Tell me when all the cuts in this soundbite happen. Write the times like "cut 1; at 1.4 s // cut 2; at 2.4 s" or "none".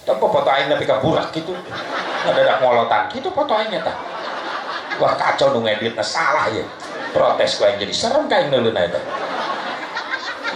none

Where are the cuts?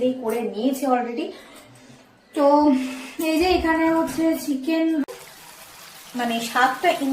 cut 1; at 5.1 s

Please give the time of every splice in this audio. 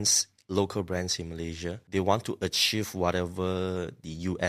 cut 1; at 1.8 s

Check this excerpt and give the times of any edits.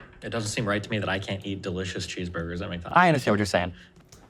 none

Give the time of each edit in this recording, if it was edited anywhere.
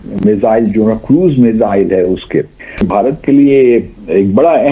cut 1; at 2.9 s

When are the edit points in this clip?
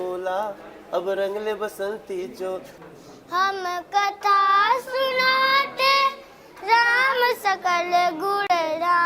cut 1; at 2.7 s

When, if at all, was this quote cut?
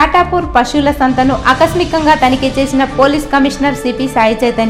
none

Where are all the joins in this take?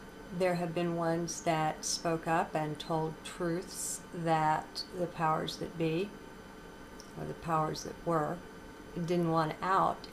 cut 1; at 4.5 s

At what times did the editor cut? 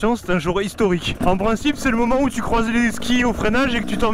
cut 1; at 1.2 s

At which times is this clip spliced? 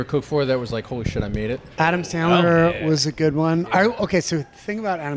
cut 1; at 1.7 s

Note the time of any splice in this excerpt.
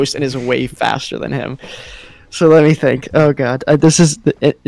none

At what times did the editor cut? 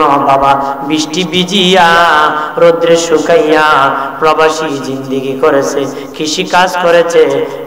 none

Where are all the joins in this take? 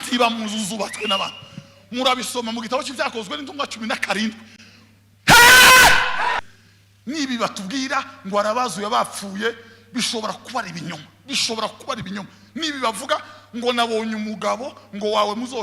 cut 1; at 6.5 s

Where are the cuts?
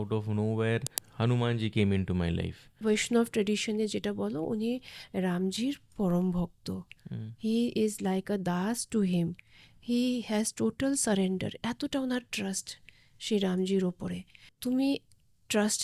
cut 1; at 1.0 s // cut 2; at 2.8 s // cut 3; at 14.5 s

